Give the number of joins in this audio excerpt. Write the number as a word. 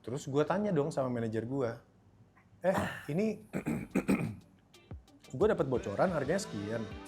zero